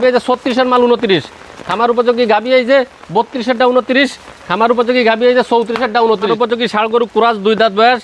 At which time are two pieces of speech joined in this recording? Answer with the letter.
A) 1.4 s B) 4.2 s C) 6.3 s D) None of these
C